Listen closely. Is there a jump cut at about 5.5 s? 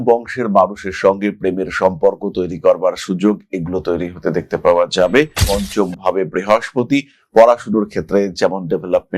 yes; 1 cut; at 5.5 s

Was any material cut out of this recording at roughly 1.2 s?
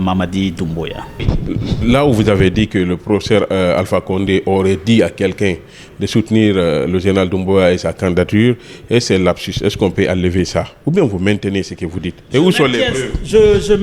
yes; 1 cut; at 1.2 s

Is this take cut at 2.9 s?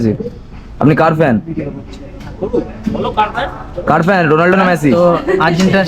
no; 1 cut; at 4.9 s

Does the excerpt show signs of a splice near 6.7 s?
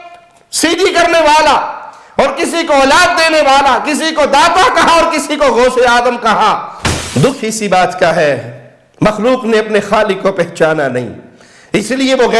yes; 1 cut; at 6.7 s

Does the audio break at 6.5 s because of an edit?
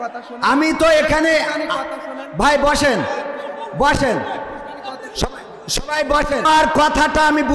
yes; 1 cut; at 6.5 s

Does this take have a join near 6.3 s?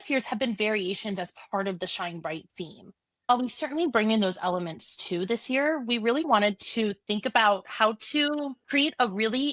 yes; 1 cut; at 6.3 s

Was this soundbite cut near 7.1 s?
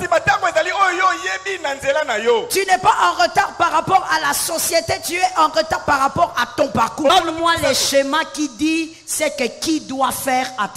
yes; 1 cut; at 7.1 s

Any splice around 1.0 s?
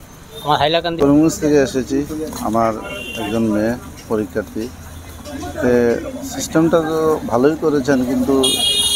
yes; 1 cut; at 1.0 s

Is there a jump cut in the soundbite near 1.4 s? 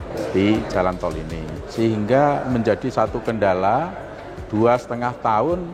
yes; 1 cut; at 1.4 s

